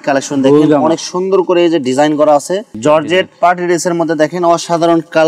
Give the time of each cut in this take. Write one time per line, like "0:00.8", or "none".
0:02.7

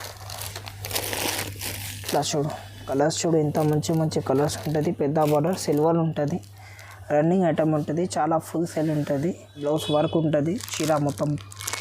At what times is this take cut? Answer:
0:02.8
0:09.6

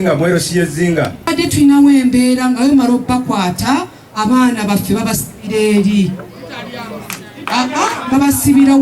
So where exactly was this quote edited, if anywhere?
0:01.3

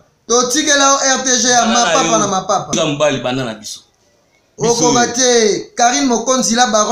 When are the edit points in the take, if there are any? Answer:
0:02.7

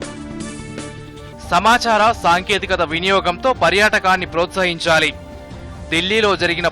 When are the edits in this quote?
0:00.9

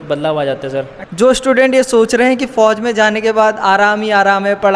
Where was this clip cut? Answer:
0:01.0

